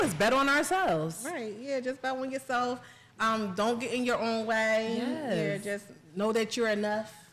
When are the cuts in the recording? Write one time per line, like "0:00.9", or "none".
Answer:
none